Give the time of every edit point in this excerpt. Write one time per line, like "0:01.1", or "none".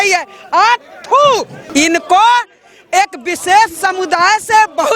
0:01.6